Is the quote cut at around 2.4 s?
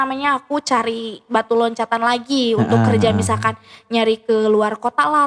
no; 0 cuts

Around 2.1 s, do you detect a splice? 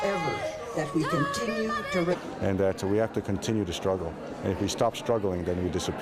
no; 0 cuts

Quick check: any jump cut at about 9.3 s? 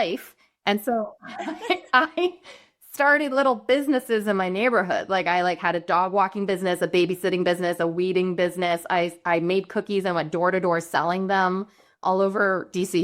no; 1 cut; at 12.0 s

